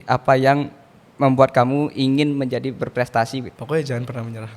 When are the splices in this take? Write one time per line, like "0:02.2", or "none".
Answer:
0:03.5